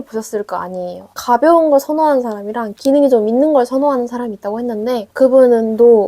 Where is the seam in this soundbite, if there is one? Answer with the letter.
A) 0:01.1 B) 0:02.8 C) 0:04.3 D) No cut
A